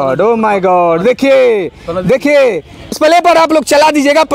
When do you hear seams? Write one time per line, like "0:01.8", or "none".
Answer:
0:02.9